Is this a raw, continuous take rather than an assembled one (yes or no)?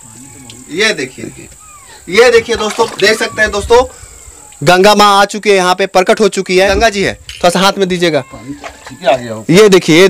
no